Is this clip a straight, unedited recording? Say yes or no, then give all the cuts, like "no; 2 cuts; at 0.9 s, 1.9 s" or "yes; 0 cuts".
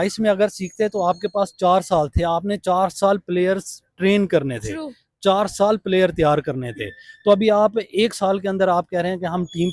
yes; 0 cuts